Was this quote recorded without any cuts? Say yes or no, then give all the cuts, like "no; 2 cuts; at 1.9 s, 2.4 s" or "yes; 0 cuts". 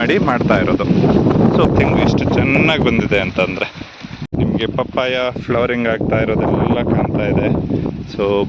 no; 2 cuts; at 1.7 s, 4.3 s